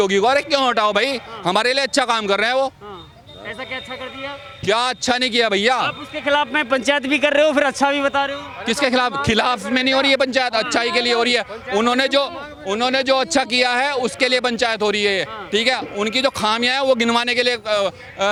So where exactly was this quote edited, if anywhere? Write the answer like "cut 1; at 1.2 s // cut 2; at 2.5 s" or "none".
none